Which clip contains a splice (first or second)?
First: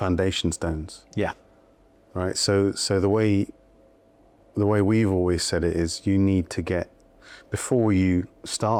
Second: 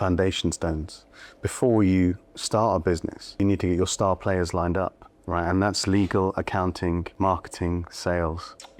second